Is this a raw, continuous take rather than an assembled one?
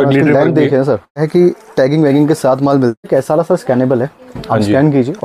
no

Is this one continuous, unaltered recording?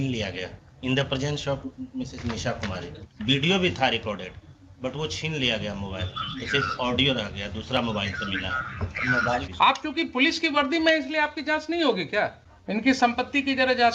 no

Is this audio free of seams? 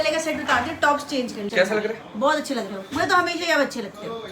no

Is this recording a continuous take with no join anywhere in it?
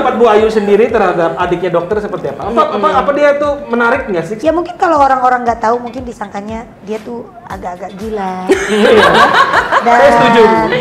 no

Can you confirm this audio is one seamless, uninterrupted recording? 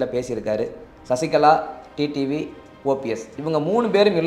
yes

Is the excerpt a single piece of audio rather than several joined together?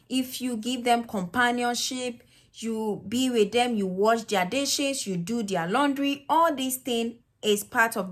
yes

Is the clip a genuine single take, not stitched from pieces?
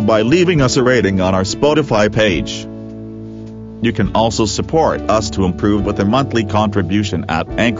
yes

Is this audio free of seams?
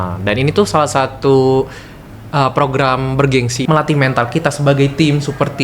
no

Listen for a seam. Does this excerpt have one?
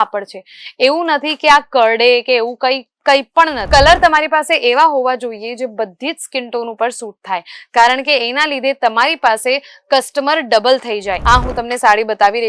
yes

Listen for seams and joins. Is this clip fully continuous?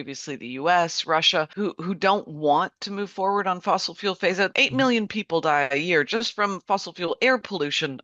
no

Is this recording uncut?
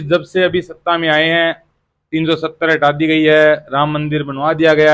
yes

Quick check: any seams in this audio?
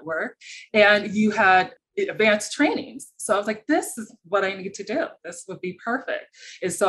no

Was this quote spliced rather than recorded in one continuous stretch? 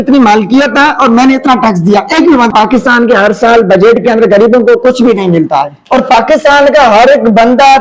yes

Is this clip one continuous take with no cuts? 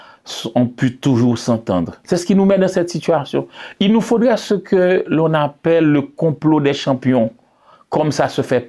no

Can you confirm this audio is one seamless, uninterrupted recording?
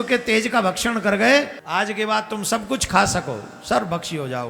no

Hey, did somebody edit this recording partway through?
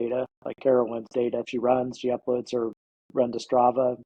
yes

